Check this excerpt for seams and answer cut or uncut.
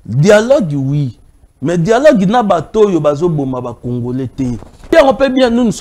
cut